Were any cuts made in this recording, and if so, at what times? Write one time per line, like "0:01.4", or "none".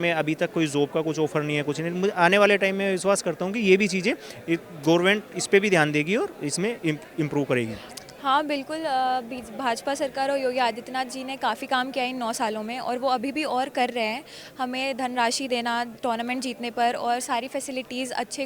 0:07.8